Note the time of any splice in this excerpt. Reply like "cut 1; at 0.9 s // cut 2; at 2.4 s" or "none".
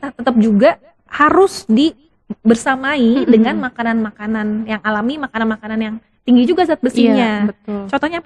none